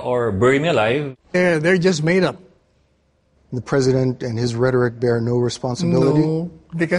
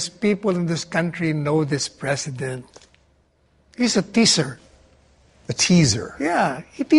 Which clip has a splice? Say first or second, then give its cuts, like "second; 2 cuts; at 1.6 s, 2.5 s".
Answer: first; 1 cut; at 1.3 s